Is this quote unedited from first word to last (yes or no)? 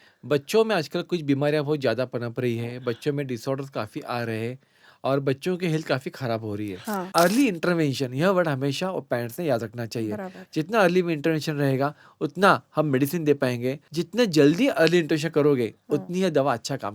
no